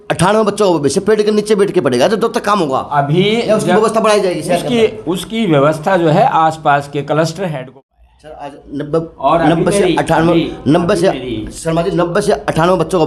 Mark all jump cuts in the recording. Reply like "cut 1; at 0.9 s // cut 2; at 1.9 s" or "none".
cut 1; at 7.5 s